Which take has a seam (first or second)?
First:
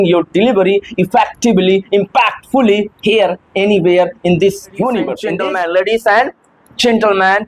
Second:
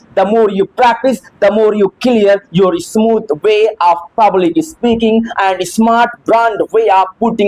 first